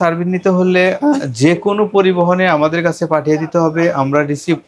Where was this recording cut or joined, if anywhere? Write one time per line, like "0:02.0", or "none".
none

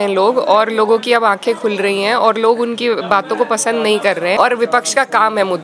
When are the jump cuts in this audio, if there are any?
0:04.4

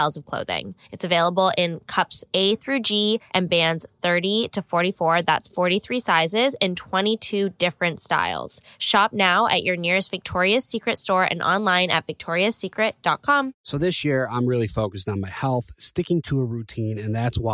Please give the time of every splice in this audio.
0:13.6

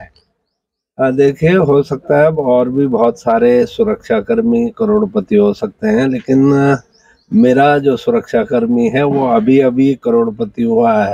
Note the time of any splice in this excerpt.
none

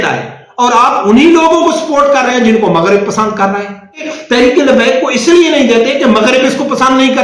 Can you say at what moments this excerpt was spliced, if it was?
0:04.0

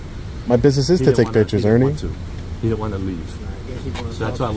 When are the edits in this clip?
none

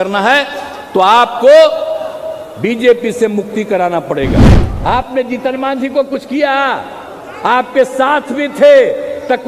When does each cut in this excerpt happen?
0:04.6

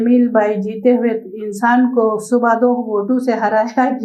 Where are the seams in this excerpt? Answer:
none

